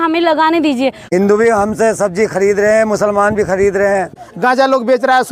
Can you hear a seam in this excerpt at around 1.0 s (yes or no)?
yes